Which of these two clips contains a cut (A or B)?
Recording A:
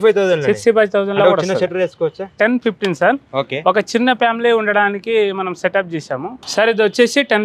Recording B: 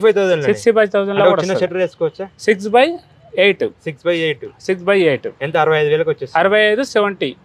A